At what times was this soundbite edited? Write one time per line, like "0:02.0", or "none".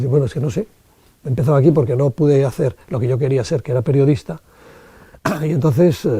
none